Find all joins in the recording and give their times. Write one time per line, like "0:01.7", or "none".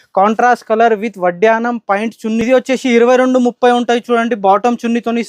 0:02.4